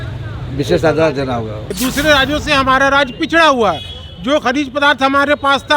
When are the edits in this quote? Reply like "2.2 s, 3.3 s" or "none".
1.7 s